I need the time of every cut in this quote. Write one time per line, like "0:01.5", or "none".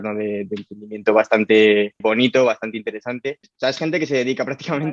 0:03.5